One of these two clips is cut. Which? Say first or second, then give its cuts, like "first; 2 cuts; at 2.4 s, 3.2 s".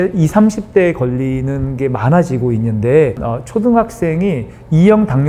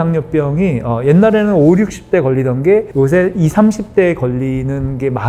first; 1 cut; at 3.2 s